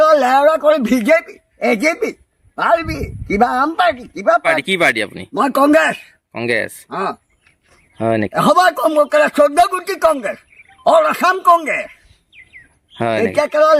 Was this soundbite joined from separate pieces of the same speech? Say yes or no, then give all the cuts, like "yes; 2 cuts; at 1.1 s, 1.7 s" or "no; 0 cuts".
yes; 1 cut; at 4.6 s